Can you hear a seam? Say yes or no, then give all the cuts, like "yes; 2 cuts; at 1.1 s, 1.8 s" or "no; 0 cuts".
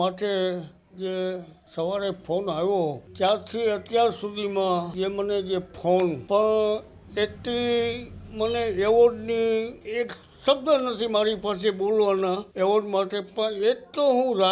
yes; 6 cuts; at 1.6 s, 3.0 s, 4.9 s, 6.2 s, 9.8 s, 12.5 s